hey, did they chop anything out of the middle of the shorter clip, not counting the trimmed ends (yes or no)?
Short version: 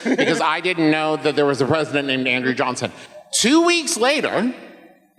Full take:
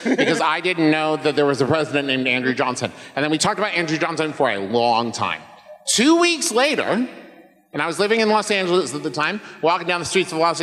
yes